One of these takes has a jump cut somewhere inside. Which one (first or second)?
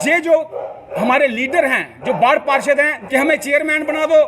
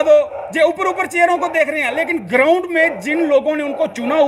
first